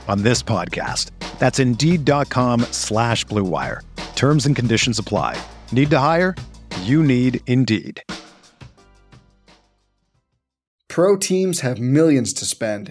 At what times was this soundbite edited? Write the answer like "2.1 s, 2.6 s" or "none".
10.8 s